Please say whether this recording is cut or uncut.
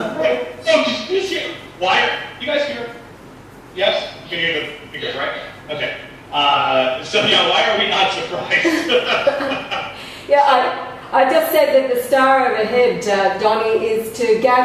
cut